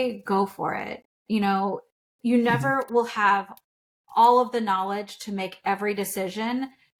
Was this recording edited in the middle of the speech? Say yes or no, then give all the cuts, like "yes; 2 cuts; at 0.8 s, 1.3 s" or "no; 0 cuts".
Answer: no; 0 cuts